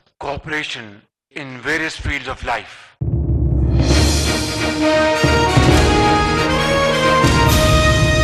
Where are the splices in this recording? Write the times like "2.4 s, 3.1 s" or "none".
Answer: 2.9 s

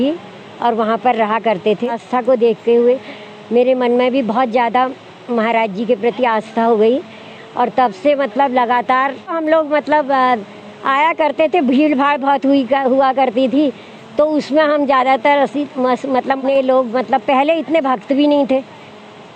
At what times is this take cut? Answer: 2.0 s, 9.4 s, 16.4 s

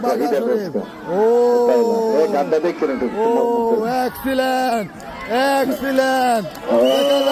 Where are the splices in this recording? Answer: none

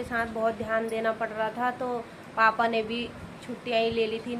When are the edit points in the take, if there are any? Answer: none

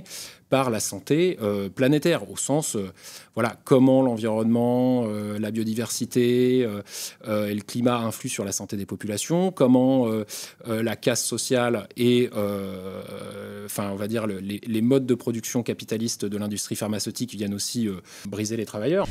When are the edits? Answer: 18.2 s

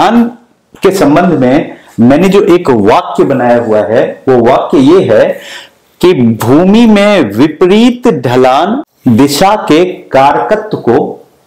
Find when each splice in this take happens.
8.9 s

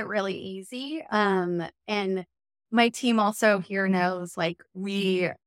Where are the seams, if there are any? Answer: none

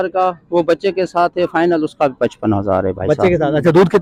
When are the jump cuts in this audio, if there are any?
none

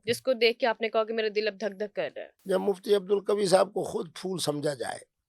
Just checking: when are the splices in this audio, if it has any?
2.3 s

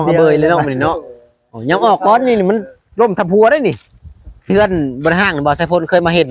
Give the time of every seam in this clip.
4.5 s

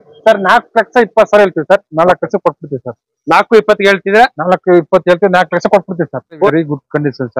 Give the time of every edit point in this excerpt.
6.5 s

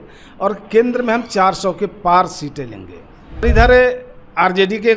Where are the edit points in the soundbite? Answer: 3.0 s

